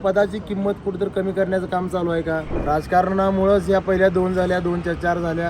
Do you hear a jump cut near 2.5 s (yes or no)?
yes